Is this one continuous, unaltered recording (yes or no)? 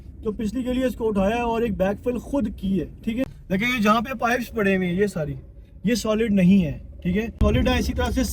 no